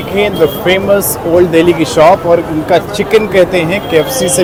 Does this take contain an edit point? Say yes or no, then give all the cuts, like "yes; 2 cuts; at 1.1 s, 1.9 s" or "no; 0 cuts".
no; 0 cuts